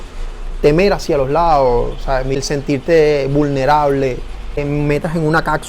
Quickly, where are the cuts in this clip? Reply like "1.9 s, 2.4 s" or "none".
2.3 s, 4.6 s